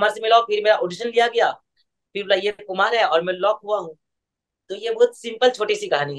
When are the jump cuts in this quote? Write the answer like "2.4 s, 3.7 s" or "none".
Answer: none